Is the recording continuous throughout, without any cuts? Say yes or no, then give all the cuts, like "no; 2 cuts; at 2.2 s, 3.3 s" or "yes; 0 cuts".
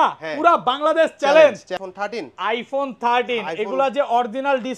no; 1 cut; at 1.8 s